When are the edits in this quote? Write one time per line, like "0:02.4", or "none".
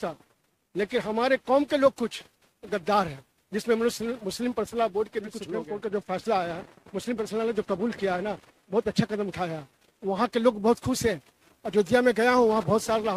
0:05.5